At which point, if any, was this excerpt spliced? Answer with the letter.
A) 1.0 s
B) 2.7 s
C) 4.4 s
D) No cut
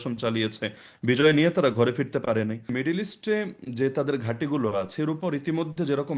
B